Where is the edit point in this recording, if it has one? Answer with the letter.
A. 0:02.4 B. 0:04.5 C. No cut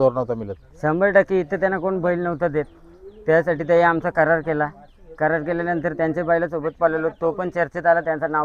C